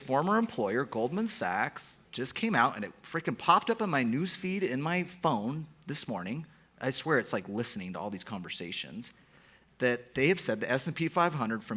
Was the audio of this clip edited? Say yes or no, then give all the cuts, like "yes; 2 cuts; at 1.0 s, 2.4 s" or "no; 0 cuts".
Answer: no; 0 cuts